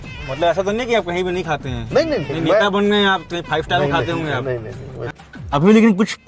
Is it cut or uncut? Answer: cut